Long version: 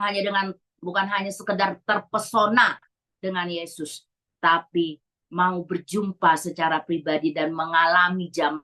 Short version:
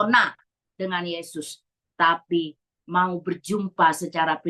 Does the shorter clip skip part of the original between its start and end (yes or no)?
no